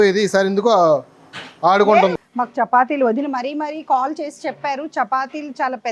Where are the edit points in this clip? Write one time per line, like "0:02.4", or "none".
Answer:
0:02.1